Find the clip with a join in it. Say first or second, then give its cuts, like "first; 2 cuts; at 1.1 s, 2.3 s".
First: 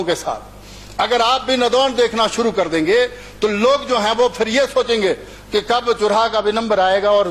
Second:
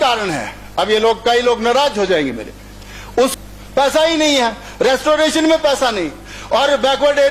second; 1 cut; at 3.4 s